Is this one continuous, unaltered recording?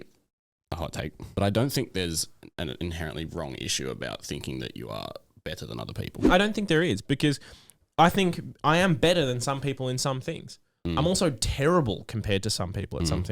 no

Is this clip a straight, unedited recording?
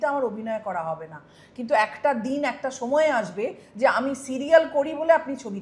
yes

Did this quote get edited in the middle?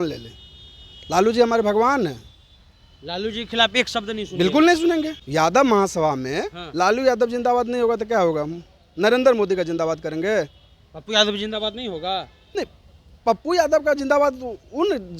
yes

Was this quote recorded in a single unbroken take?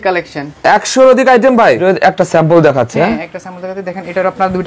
no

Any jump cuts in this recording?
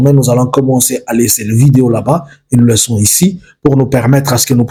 no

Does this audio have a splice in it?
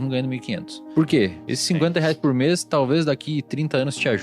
yes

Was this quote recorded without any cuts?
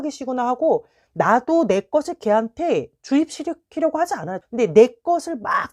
no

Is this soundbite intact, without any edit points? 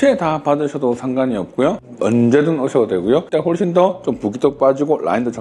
no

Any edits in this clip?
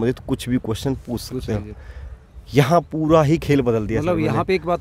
no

